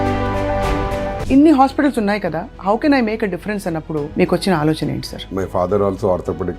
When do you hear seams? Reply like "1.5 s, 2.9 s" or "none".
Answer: 1.1 s, 5.2 s